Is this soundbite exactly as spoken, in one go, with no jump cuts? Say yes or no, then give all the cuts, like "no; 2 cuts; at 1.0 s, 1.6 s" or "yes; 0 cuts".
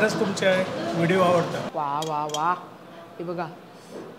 no; 1 cut; at 1.6 s